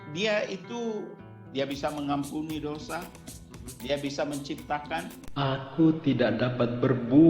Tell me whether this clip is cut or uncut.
cut